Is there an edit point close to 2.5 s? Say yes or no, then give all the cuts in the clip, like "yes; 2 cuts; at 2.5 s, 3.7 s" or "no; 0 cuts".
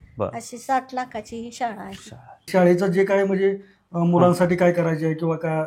yes; 1 cut; at 2.5 s